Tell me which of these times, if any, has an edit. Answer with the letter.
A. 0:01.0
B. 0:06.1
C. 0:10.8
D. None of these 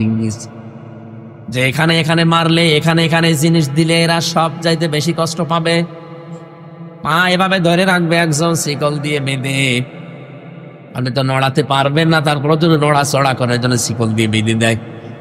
D